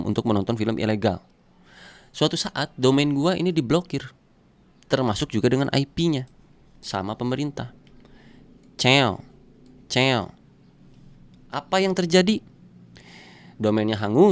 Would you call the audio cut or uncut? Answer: uncut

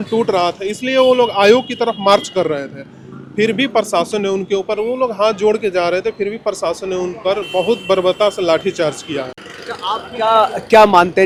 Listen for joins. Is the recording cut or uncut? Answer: uncut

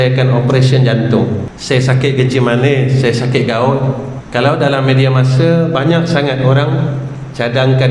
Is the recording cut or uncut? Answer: cut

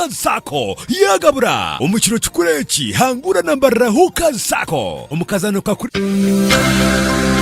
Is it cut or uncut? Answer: cut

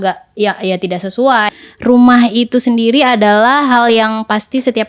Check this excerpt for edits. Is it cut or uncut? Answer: cut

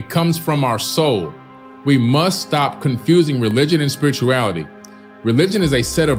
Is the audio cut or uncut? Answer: uncut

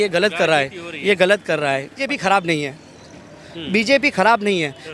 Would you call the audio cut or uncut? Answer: cut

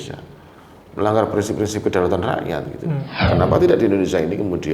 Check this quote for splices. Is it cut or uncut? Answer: cut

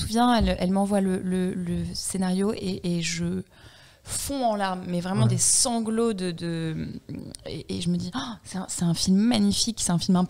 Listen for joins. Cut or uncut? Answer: uncut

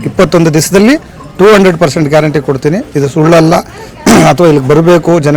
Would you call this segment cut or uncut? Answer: uncut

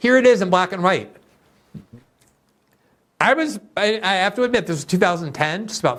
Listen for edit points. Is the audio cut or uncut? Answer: uncut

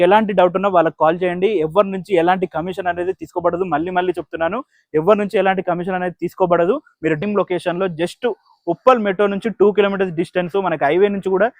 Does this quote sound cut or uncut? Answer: cut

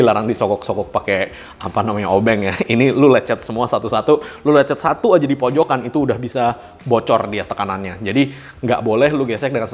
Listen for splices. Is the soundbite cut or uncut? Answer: uncut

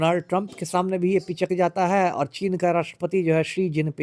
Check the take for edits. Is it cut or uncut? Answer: uncut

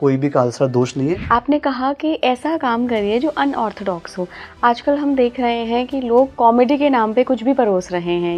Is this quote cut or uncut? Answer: cut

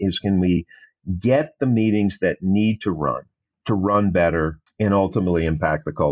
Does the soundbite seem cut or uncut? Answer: cut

